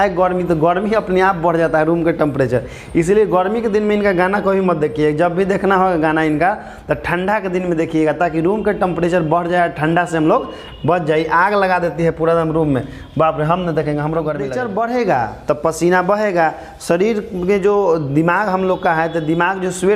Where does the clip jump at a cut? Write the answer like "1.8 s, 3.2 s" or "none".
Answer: 14.4 s